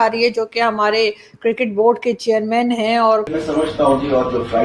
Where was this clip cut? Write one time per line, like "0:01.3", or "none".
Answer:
0:03.3